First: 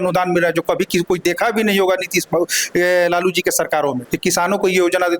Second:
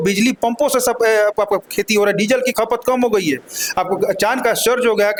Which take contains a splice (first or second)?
first